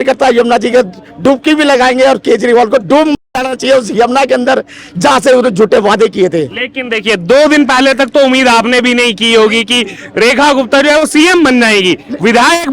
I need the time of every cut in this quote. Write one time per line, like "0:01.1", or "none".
none